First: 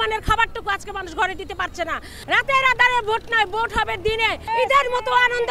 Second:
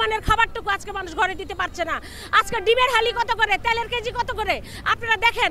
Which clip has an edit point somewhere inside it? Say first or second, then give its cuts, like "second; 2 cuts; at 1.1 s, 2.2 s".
first; 2 cuts; at 2.1 s, 4.5 s